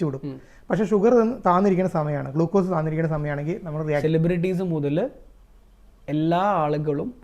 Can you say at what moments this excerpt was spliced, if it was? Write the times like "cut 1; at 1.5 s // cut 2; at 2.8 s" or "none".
cut 1; at 4.0 s